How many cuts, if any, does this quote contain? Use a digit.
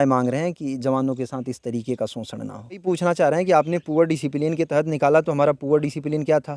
1